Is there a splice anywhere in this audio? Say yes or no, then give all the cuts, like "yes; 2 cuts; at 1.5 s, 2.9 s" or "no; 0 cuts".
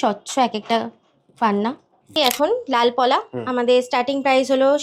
yes; 1 cut; at 2.1 s